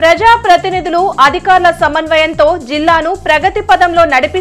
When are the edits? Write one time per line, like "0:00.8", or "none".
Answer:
none